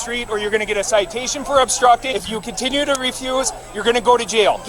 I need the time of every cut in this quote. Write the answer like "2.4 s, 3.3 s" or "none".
2.1 s